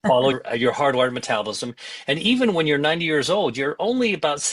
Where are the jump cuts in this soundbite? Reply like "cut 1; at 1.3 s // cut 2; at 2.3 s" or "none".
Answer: none

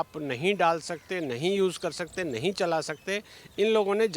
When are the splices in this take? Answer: none

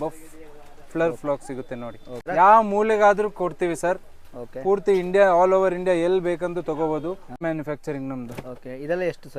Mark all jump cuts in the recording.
cut 1; at 2.2 s // cut 2; at 7.4 s

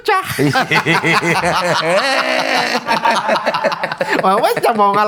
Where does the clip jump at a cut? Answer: none

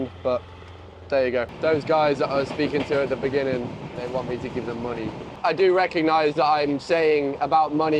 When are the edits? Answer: cut 1; at 1.5 s // cut 2; at 4.0 s // cut 3; at 5.3 s

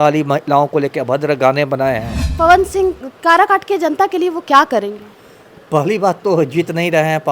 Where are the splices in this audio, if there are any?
cut 1; at 2.2 s

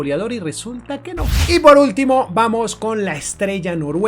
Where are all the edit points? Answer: cut 1; at 1.3 s

